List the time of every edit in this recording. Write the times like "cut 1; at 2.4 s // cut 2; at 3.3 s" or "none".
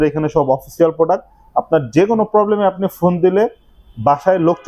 none